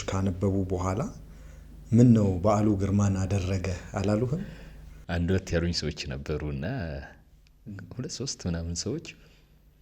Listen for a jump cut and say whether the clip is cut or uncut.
uncut